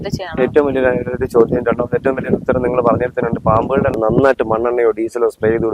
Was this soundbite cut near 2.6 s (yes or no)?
no